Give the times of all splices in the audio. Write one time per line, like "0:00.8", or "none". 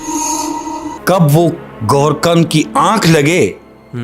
0:00.9